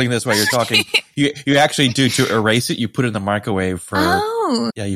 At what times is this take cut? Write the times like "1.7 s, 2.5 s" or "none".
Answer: none